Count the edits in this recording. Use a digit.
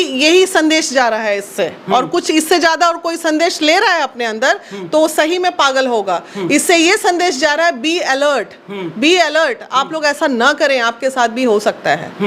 0